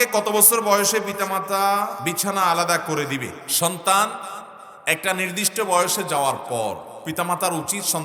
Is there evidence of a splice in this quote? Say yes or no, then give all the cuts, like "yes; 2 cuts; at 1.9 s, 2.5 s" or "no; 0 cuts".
no; 0 cuts